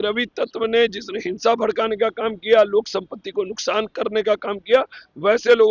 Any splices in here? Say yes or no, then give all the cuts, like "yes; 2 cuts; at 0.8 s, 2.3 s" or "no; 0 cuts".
no; 0 cuts